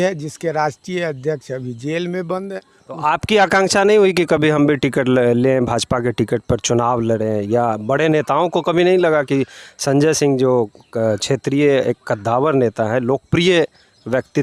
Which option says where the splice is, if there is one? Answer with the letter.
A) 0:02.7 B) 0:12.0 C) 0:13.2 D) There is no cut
A